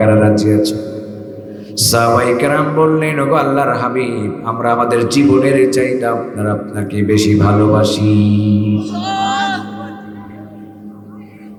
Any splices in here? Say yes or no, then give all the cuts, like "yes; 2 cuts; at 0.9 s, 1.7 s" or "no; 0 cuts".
no; 0 cuts